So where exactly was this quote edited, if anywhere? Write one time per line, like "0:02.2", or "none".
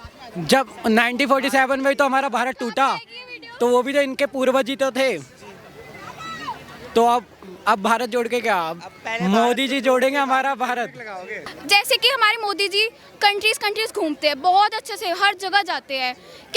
0:11.6